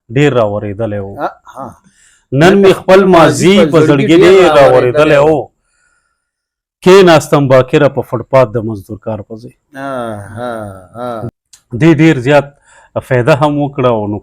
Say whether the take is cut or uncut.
cut